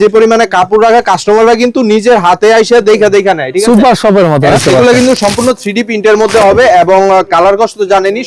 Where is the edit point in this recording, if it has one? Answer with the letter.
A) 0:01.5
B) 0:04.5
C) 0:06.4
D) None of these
B